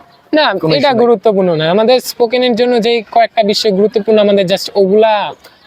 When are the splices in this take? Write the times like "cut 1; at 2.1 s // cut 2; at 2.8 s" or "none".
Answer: none